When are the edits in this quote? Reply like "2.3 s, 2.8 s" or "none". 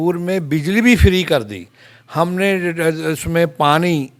none